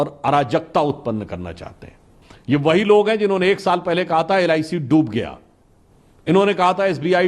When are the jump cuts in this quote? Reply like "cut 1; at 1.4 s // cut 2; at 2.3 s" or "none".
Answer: cut 1; at 2.0 s